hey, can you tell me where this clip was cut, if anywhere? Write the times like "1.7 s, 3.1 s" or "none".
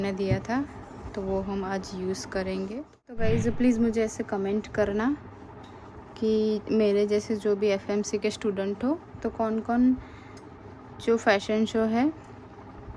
3.2 s

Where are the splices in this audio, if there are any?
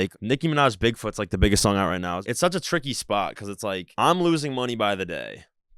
2.2 s

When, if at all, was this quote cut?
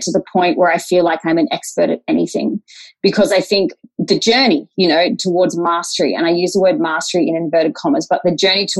3.8 s, 5.2 s

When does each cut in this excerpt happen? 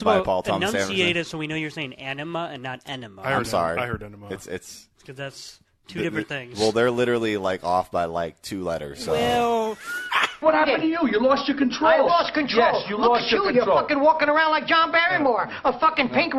10.4 s

